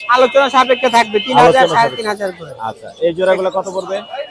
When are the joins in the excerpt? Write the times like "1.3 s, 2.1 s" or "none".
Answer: none